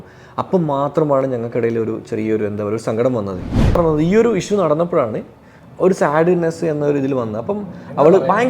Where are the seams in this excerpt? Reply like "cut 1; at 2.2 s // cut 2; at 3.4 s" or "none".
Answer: cut 1; at 3.8 s